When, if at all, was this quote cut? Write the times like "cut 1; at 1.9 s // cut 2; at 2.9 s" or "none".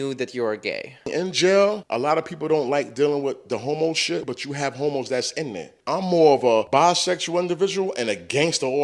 cut 1; at 1.1 s // cut 2; at 1.9 s // cut 3; at 4.2 s // cut 4; at 5.7 s // cut 5; at 6.7 s